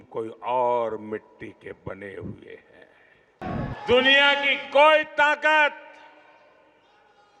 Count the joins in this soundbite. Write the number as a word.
one